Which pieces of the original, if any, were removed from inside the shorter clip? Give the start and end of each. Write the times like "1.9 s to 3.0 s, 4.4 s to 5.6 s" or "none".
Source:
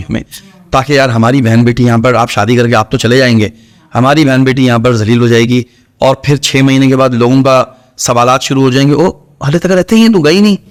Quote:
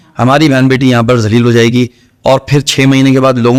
none